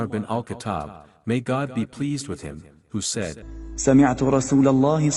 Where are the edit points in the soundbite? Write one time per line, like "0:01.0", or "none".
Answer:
0:03.5

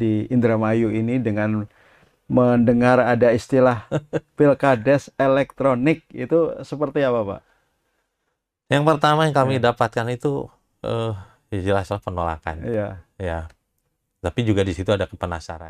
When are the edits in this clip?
none

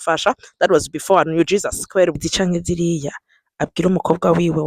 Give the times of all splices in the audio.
0:02.2

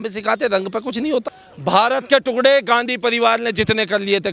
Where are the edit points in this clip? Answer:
0:01.4

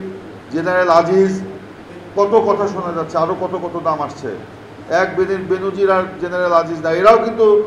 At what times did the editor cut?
none

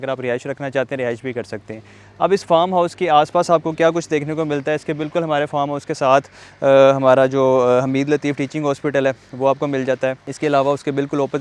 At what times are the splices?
none

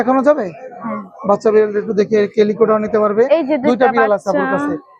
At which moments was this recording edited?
none

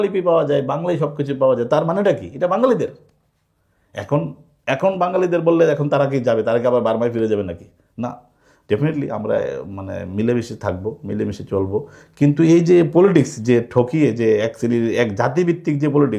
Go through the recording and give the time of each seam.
none

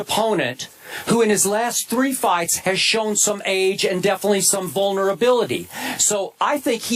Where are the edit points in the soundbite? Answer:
0:04.5

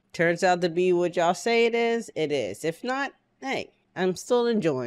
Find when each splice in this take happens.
0:03.8

